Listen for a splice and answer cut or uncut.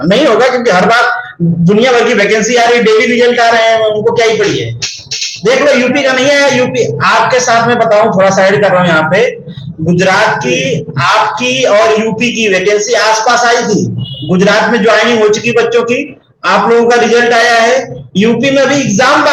uncut